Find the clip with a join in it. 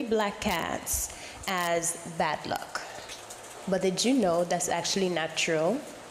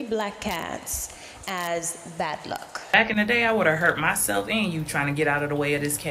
second; 1 cut; at 2.9 s

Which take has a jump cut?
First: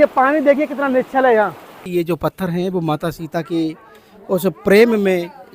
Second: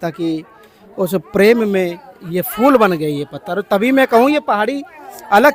first; 1 cut; at 1.8 s

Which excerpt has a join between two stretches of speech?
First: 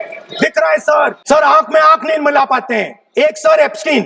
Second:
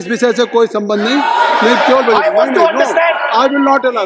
first; 2 cuts; at 1.2 s, 3.0 s

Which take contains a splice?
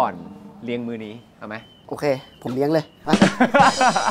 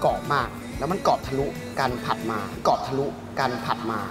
first; 1 cut; at 1.8 s

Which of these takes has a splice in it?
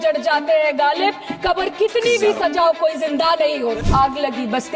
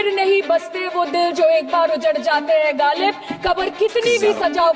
first; 1 cut; at 3.8 s

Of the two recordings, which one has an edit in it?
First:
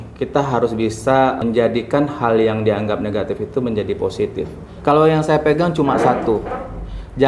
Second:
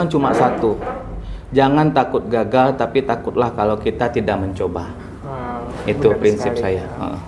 first; 2 cuts; at 1.4 s, 4.6 s

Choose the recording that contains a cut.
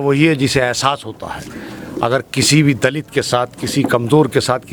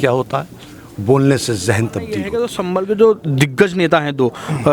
second; 1 cut; at 2.3 s

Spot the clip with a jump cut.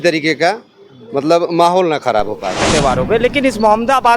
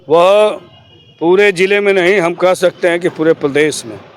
first; 1 cut; at 2.7 s

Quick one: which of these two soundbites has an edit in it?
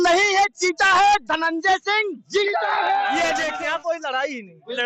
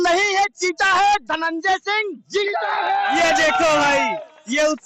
first; 1 cut; at 3.5 s

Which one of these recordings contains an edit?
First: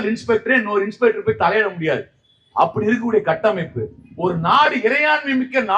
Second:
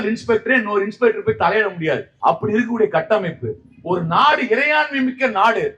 second; 1 cut; at 2.1 s

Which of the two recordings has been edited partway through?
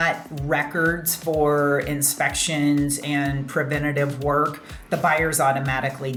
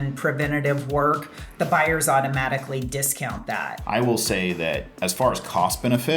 second; 2 cuts; at 3.8 s, 4.9 s

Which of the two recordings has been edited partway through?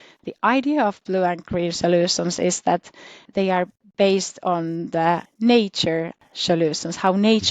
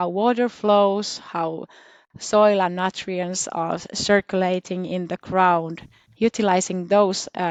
first; 3 cuts; at 3.3 s, 5.3 s, 6.3 s

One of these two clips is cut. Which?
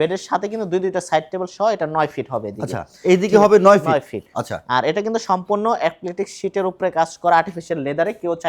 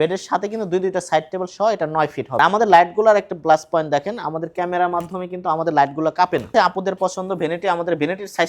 second; 2 cuts; at 2.4 s, 6.5 s

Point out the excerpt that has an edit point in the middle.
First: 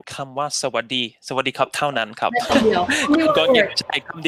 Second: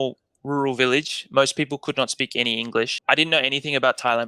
second; 1 cut; at 3.0 s

